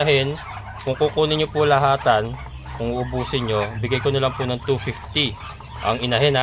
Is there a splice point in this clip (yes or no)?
no